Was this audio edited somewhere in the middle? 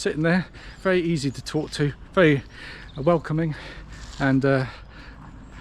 no; 0 cuts

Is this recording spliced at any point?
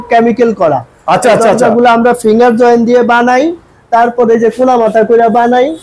no; 0 cuts

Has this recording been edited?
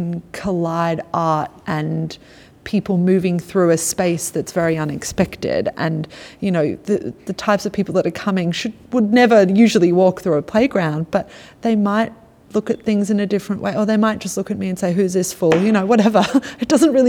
no; 0 cuts

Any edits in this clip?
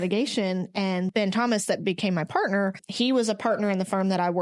yes; 2 cuts; at 1.1 s, 2.8 s

